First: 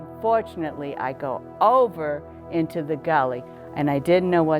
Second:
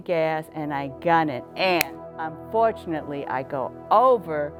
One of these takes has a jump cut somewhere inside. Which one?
first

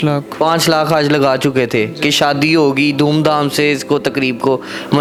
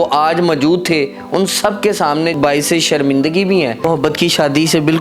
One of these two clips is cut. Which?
second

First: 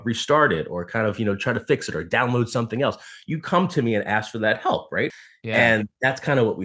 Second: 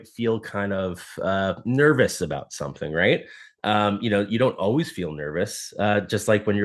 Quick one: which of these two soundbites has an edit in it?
first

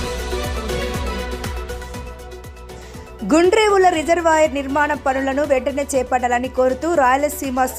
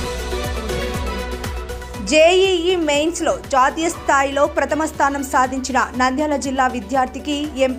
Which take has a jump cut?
first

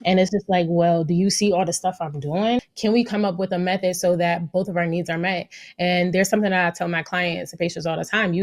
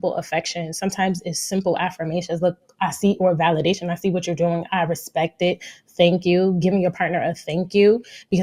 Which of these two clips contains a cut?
first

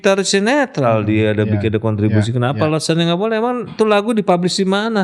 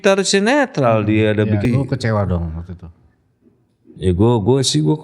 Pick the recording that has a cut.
second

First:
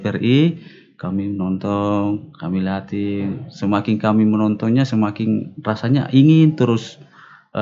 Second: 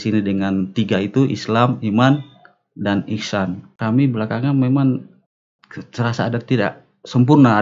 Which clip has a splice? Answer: second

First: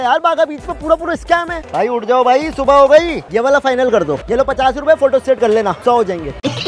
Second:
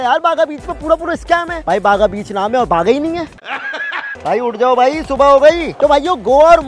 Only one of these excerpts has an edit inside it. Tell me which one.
first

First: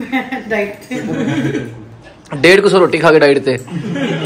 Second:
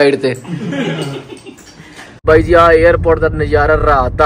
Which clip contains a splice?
second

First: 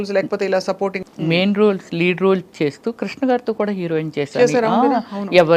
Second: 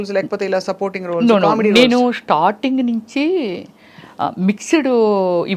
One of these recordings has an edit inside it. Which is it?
first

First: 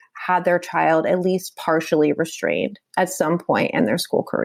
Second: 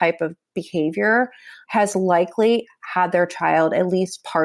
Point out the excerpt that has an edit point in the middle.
second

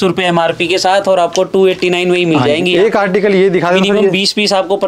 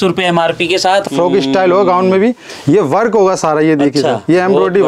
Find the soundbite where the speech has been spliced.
second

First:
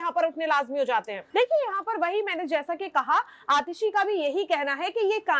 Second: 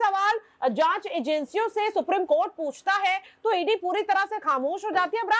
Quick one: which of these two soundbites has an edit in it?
first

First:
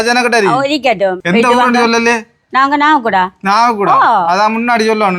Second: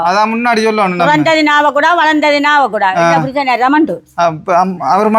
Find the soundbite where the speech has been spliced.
first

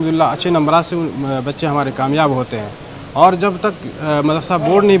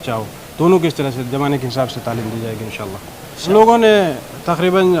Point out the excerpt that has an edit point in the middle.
second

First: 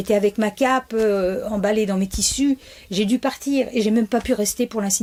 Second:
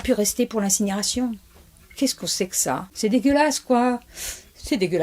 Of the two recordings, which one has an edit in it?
second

